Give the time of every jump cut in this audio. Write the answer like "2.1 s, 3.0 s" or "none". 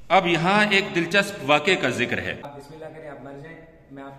2.4 s